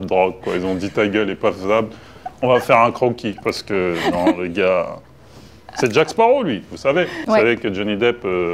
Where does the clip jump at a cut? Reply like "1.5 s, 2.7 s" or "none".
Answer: none